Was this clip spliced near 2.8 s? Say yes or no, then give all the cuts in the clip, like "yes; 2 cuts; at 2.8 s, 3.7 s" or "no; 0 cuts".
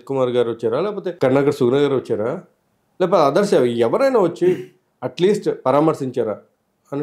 no; 1 cut; at 1.1 s